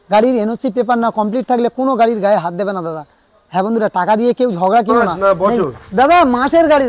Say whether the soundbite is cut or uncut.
cut